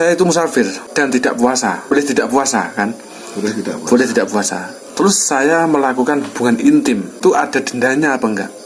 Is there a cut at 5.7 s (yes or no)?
no